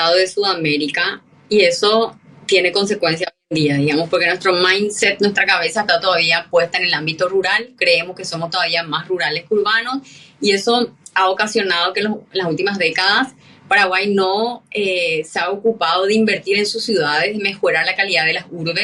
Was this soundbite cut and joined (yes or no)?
no